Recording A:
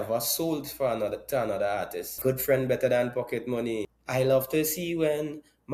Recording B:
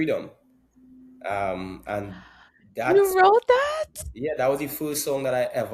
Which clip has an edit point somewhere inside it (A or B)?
A